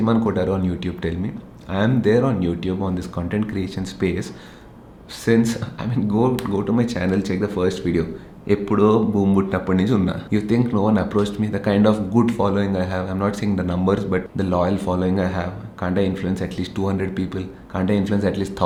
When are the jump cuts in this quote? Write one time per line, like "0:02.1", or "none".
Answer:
none